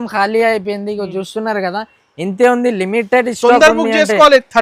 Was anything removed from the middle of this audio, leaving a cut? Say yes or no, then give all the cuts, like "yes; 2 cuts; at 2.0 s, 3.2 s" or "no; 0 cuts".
no; 0 cuts